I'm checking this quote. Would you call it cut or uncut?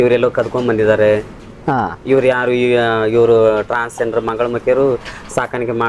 uncut